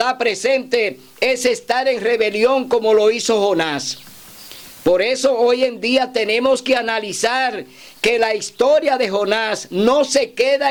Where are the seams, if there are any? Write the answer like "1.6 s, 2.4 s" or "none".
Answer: none